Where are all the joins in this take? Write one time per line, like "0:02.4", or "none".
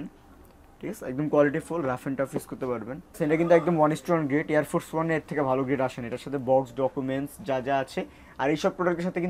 0:03.2